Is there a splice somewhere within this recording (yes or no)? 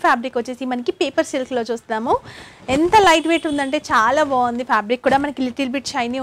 no